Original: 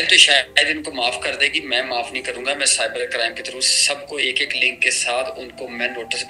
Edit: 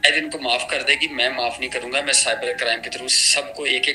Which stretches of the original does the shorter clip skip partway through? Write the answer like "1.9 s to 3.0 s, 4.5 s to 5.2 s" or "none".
none

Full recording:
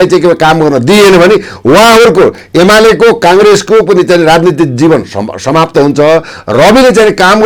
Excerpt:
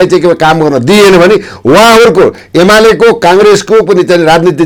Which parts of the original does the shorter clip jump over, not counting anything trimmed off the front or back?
none

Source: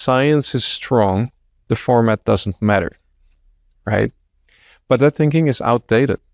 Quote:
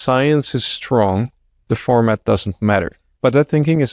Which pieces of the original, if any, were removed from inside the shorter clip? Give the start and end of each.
3.0 s to 4.7 s

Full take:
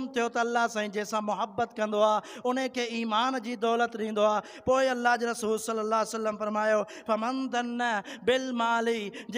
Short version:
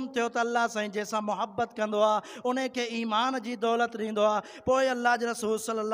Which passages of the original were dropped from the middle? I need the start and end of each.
none

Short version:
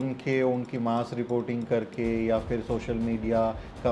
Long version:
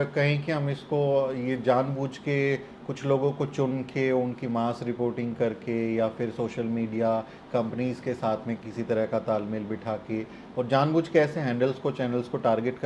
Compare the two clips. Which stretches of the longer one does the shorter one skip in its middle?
none

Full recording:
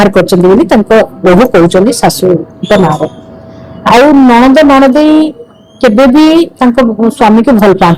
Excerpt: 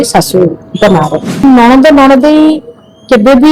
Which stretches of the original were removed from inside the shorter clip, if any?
3.3 s to 4.1 s

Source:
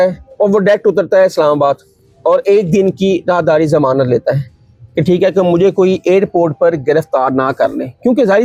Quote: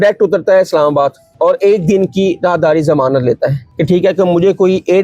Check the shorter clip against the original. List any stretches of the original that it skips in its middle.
1.9 s to 2.1 s, 4.5 s to 4.8 s

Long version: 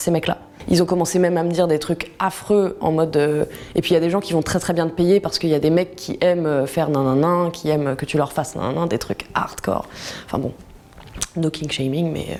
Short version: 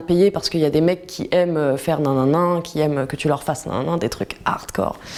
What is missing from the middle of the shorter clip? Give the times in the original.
none

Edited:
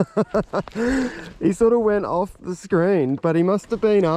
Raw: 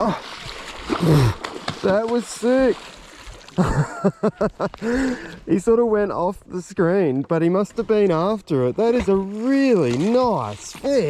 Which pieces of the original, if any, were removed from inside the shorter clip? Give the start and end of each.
none

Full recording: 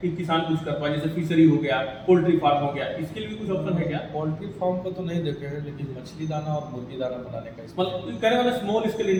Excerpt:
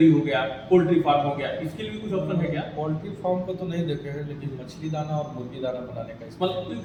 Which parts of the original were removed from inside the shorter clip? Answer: none

